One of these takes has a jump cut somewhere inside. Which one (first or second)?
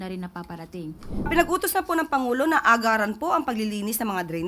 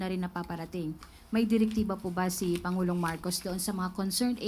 first